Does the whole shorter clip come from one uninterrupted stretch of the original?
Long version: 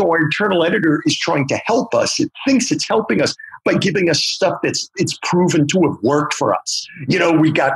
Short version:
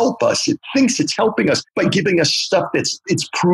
no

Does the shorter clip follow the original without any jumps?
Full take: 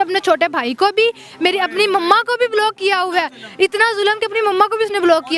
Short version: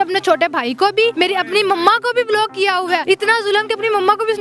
no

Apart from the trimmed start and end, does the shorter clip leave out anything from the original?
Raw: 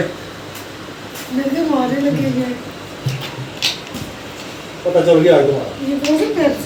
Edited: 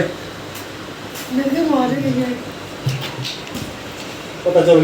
yes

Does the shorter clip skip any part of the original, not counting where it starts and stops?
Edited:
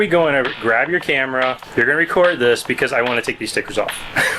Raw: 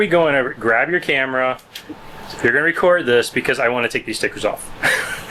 yes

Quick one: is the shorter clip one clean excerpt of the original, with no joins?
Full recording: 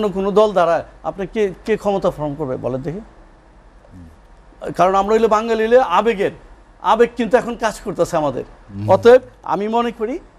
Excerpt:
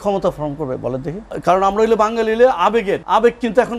no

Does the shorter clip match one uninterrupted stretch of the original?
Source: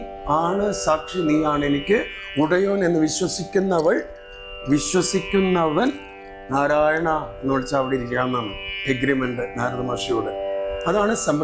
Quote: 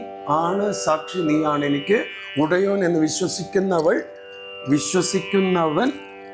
yes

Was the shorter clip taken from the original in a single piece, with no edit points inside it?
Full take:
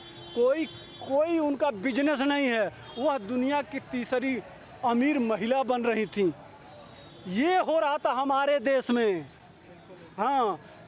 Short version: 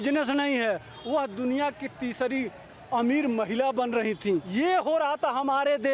no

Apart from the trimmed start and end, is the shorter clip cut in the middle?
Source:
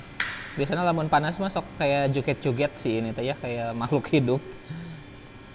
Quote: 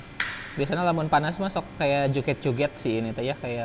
no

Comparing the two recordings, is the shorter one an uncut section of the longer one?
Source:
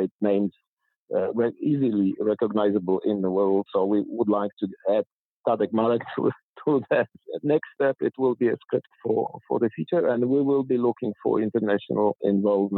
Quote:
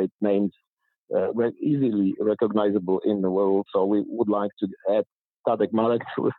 yes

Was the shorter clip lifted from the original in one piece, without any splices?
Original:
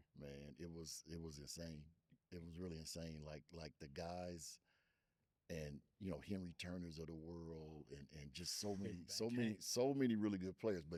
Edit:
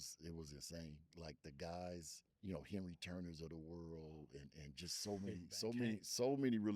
no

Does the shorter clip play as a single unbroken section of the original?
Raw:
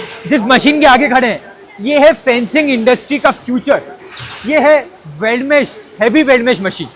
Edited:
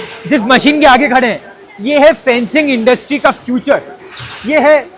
yes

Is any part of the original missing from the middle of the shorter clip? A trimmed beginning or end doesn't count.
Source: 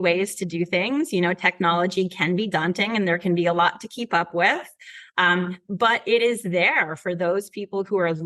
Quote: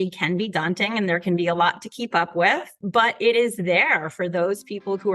yes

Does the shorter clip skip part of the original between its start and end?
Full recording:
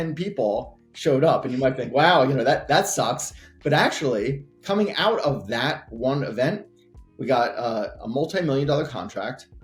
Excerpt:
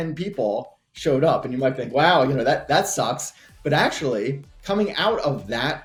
no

